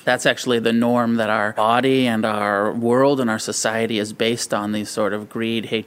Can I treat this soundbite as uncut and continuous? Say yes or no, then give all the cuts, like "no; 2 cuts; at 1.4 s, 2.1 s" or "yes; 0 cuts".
no; 1 cut; at 1.5 s